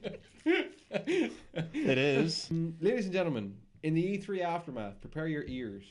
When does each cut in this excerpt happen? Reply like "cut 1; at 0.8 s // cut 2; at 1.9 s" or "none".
cut 1; at 2.5 s